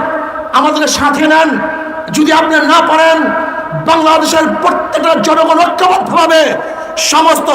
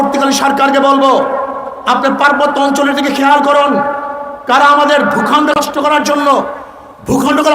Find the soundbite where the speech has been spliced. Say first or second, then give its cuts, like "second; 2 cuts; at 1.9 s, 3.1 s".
second; 1 cut; at 5.5 s